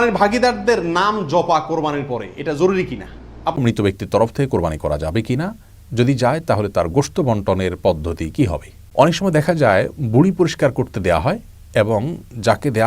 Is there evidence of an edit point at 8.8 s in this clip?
yes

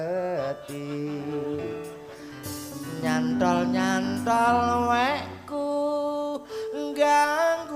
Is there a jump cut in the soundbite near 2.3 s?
no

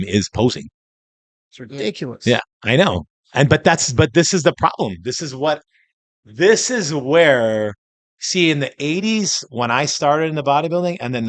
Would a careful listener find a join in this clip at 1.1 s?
no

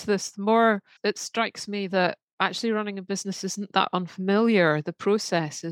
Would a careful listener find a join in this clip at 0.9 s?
yes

